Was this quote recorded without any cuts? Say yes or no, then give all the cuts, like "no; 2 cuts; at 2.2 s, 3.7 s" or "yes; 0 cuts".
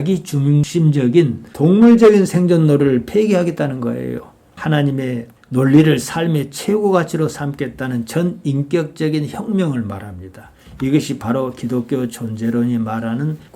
no; 1 cut; at 4.5 s